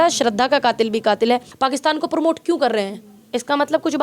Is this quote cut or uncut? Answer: cut